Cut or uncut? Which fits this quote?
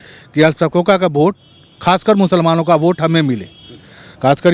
uncut